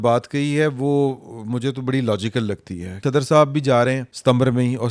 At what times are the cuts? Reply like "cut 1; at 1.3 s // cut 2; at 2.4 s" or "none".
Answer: cut 1; at 3.0 s

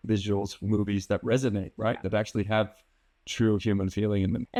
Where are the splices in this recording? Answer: none

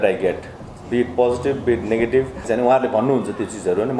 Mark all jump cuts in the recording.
cut 1; at 2.4 s

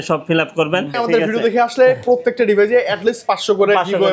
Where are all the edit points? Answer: cut 1; at 0.9 s

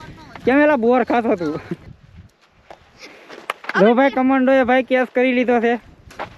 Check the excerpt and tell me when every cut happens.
cut 1; at 1.9 s

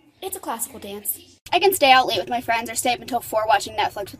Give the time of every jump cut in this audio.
none

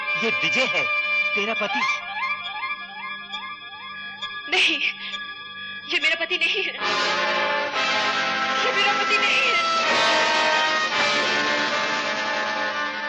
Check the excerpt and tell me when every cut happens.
none

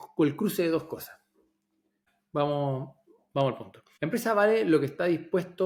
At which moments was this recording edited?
none

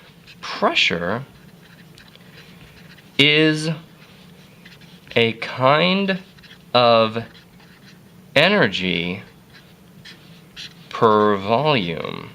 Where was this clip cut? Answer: cut 1; at 1.3 s

